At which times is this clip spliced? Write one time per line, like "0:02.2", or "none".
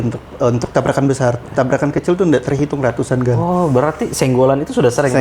none